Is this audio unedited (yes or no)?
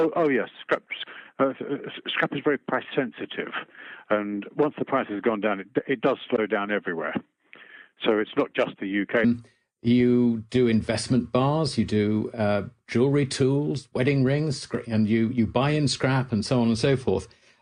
yes